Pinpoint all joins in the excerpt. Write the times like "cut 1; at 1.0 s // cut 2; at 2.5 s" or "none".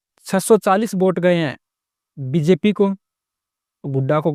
none